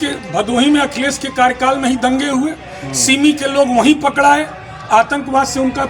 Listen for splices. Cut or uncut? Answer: uncut